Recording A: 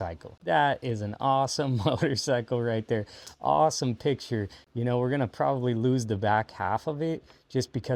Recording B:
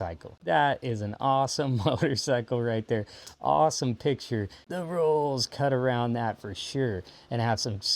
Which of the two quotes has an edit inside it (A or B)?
B